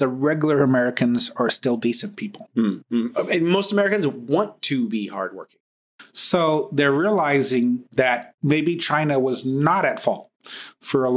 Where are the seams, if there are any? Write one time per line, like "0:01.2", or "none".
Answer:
0:05.7